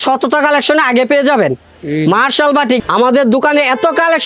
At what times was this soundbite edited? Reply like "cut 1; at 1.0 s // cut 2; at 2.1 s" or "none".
cut 1; at 2.8 s